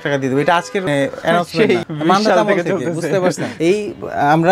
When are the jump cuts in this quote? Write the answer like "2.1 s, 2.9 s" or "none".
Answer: none